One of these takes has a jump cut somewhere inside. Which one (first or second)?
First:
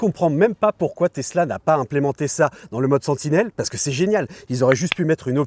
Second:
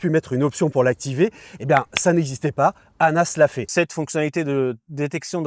second